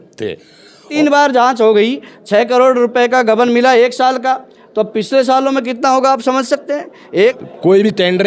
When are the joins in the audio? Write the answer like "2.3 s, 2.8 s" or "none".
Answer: 0.9 s, 7.4 s